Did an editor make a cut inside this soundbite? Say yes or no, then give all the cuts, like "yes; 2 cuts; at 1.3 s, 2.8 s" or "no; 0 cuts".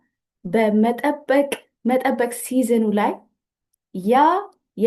no; 0 cuts